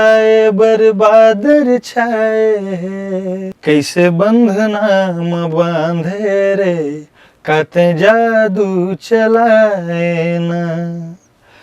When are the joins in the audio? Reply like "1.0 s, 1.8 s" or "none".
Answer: 3.5 s